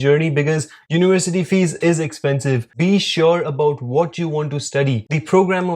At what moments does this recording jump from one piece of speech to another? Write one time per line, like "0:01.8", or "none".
0:02.7